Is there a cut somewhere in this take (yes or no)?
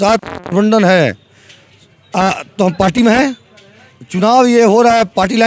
no